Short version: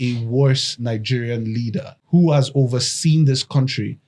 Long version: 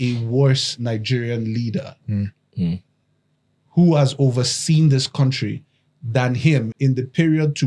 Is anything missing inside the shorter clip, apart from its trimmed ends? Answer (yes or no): yes